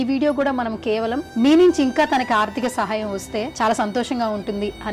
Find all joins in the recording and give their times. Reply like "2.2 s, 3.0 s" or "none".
1.2 s, 3.5 s